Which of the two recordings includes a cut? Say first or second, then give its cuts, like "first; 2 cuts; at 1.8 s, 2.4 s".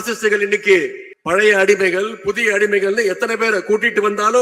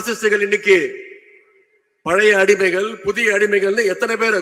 first; 1 cut; at 1.1 s